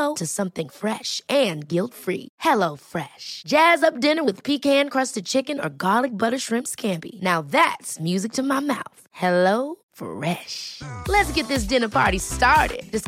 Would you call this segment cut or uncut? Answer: uncut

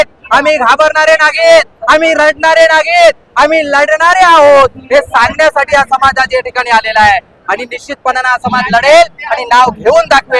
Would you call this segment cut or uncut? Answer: uncut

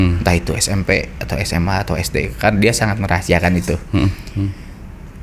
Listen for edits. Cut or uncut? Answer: uncut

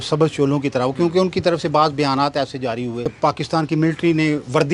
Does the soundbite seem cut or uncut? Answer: cut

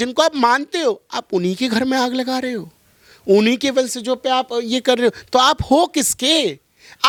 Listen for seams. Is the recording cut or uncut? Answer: uncut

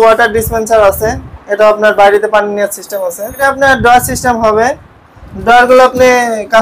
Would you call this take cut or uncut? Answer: cut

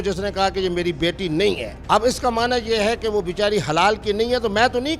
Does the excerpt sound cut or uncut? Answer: cut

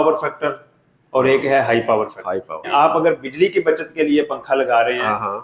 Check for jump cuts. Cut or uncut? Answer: cut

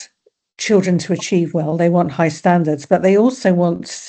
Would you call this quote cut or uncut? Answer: uncut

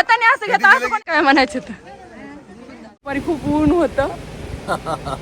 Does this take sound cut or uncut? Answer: cut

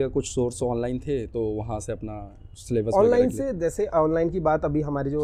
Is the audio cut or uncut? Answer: uncut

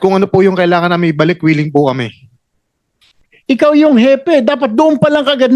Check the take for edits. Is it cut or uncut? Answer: cut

